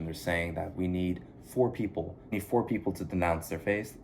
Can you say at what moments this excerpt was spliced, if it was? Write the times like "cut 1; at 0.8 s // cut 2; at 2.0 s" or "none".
cut 1; at 2.3 s